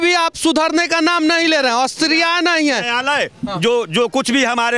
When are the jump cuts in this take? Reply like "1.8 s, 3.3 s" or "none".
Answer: none